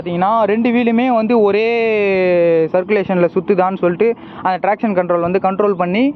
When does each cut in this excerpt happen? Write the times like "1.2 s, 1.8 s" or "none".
none